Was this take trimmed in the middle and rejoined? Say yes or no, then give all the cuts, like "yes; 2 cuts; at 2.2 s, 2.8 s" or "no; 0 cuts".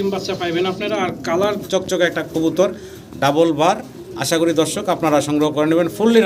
yes; 1 cut; at 1.7 s